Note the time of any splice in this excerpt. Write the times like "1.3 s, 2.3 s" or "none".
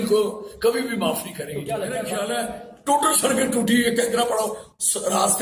2.0 s